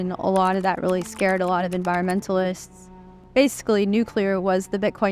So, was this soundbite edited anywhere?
yes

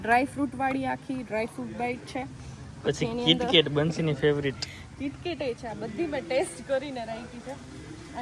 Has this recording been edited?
no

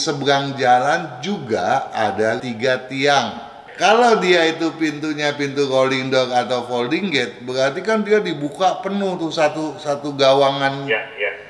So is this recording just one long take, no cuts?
no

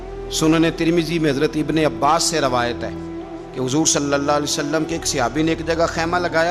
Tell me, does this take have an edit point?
no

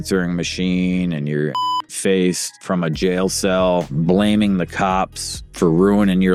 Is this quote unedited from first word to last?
yes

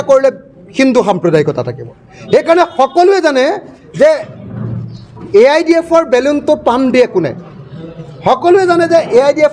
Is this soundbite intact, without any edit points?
yes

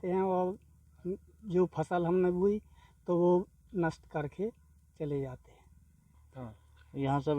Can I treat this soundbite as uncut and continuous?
no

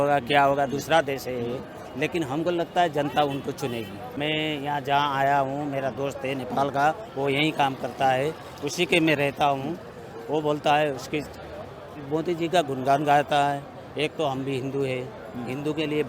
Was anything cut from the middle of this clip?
yes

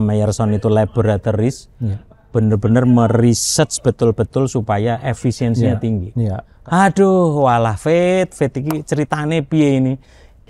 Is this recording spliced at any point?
yes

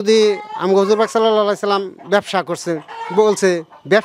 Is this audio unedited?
yes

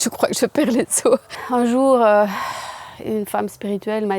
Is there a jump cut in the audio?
yes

